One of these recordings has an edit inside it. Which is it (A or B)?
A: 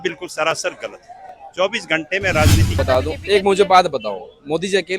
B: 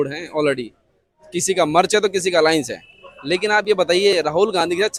A